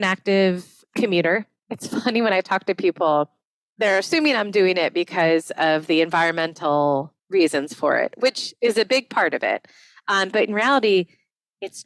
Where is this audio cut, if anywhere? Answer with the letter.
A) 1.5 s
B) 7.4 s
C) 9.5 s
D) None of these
A